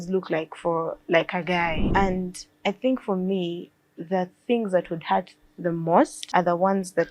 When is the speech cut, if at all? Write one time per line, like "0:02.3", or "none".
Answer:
0:01.8
0:06.2